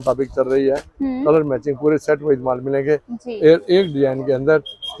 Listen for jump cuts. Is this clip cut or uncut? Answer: uncut